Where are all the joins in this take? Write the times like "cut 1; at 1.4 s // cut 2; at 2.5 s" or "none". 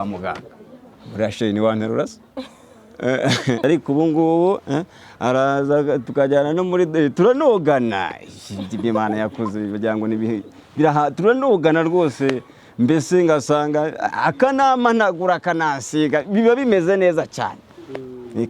cut 1; at 3.6 s